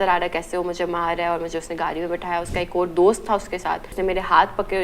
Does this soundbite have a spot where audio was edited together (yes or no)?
yes